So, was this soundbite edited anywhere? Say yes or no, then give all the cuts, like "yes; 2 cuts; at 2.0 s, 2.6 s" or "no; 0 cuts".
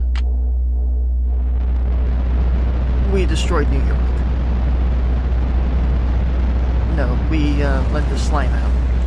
yes; 1 cut; at 4.1 s